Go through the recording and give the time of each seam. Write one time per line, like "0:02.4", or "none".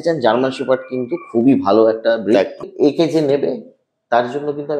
0:02.7

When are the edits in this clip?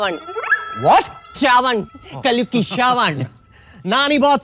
none

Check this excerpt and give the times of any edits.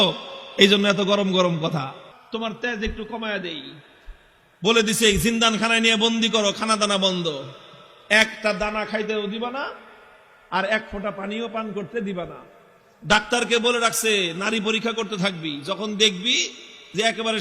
0:02.1

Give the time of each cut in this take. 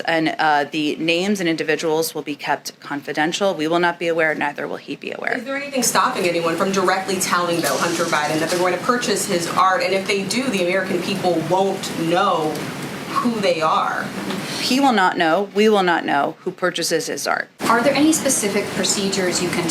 0:17.6

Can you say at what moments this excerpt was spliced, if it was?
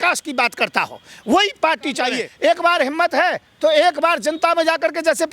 0:02.3

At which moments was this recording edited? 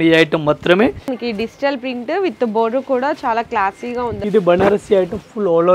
0:01.2
0:04.2

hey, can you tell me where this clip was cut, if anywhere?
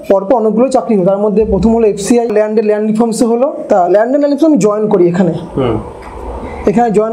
0:02.3
0:03.6

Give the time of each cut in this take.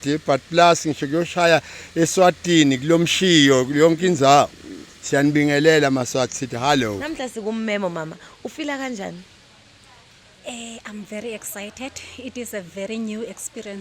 0:07.0

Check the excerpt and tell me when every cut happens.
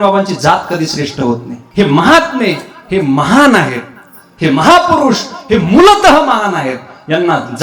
0:01.6

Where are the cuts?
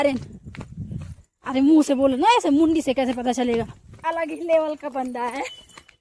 0:04.0

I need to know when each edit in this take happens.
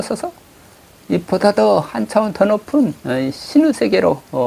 none

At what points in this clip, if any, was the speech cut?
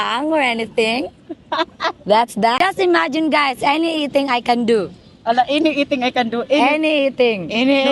0:02.6

